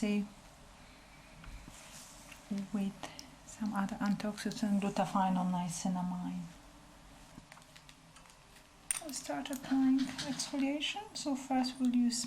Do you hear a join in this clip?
yes; 2 cuts; at 1.7 s, 7.4 s

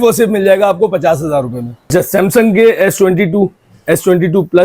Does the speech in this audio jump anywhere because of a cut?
yes; 1 cut; at 1.9 s

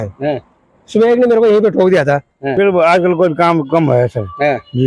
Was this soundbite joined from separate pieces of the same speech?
yes; 1 cut; at 2.4 s

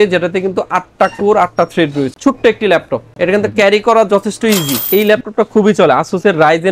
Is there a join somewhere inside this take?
yes; 2 cuts; at 2.1 s, 4.8 s

